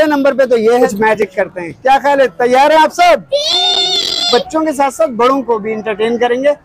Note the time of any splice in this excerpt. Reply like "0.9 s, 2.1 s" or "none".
0.8 s, 4.3 s